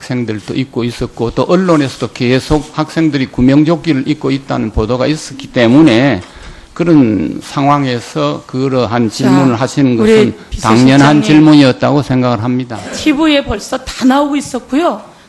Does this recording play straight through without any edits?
no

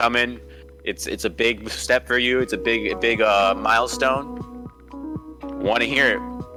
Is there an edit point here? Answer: no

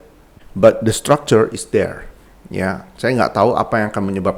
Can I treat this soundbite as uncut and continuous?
yes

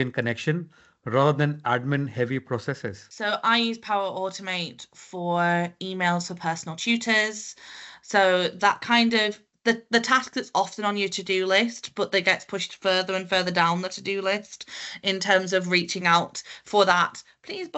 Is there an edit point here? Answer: yes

